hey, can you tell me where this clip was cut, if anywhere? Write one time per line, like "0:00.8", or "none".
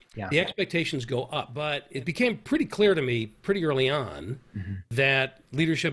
0:01.6

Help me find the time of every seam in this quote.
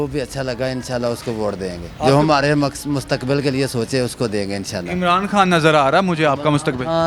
0:01.8

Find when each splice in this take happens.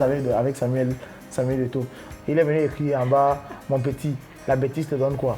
0:02.0

